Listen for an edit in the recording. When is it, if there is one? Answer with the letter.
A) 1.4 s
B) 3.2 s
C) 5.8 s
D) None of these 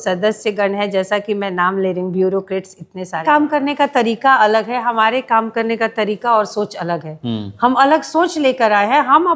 B